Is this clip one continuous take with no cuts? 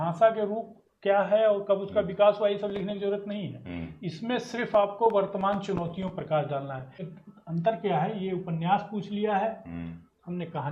no; 1 cut; at 7.0 s

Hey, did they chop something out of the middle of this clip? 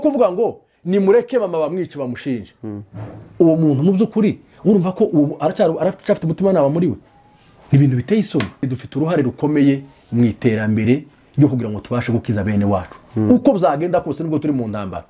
yes; 1 cut; at 8.8 s

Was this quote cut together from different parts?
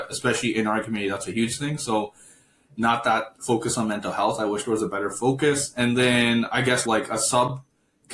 no; 0 cuts

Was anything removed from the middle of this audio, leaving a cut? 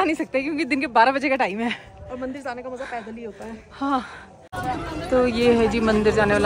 yes; 1 cut; at 4.4 s

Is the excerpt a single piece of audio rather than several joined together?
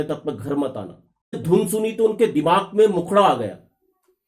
no; 1 cut; at 1.4 s

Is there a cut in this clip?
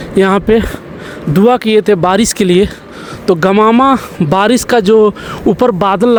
no; 0 cuts

